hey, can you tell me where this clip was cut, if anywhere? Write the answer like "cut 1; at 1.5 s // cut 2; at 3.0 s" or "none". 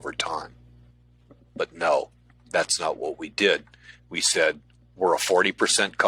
none